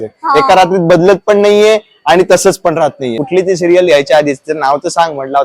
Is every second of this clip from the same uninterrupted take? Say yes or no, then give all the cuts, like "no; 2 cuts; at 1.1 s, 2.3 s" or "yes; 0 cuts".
no; 1 cut; at 3.2 s